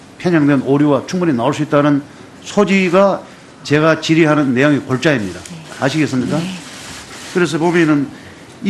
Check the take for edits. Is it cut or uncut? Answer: uncut